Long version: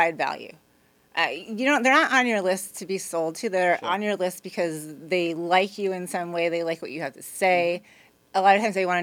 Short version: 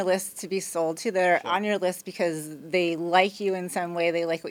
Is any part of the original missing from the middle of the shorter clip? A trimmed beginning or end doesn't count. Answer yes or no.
no